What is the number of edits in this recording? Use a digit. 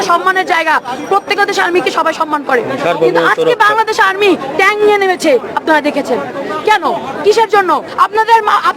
1